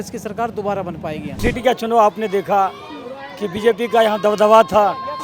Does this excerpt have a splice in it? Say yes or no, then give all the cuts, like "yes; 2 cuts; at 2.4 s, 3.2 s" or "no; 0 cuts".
yes; 1 cut; at 1.4 s